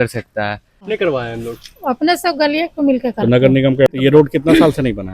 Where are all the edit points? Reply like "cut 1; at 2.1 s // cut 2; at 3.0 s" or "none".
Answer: cut 1; at 0.9 s // cut 2; at 4.0 s